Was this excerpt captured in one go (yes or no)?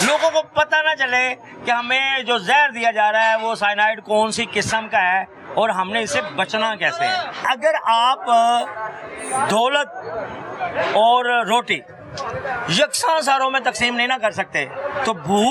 no